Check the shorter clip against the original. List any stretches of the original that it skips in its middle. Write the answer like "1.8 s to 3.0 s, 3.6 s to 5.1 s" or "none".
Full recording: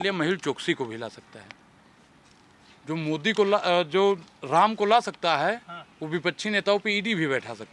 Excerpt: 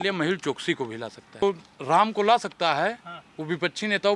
1.4 s to 4.0 s